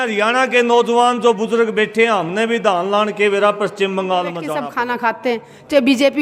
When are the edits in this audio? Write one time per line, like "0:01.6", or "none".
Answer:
0:04.6